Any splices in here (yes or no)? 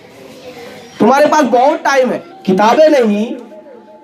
yes